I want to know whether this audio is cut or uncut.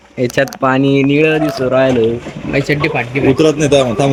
uncut